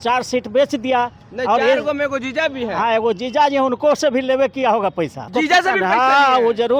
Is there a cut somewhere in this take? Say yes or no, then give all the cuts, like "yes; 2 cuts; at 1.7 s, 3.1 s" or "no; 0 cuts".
yes; 1 cut; at 5.2 s